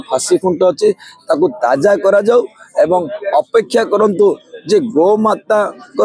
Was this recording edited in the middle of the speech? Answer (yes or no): no